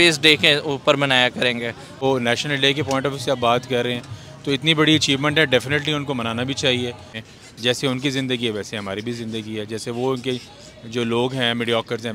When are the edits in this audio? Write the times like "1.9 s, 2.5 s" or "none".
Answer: 2.0 s, 7.2 s

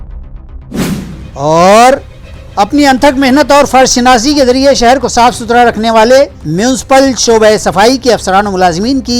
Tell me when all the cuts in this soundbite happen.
1.2 s

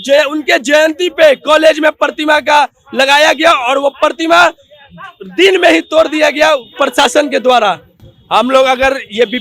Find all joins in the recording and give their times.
none

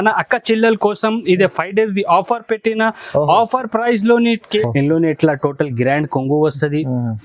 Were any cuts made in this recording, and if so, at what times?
4.6 s

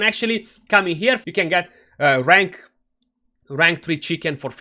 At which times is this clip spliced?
1.2 s

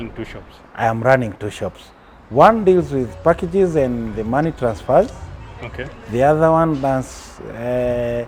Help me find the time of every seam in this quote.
none

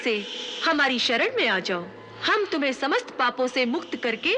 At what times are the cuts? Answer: none

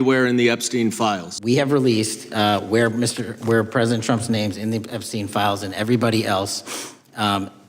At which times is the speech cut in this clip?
1.3 s

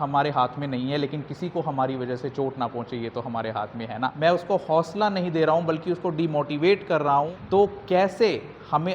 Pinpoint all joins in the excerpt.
4.1 s, 6.8 s

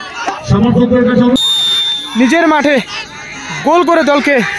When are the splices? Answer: 1.4 s

